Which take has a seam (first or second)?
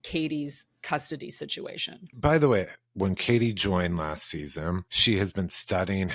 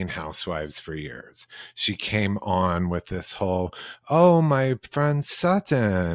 first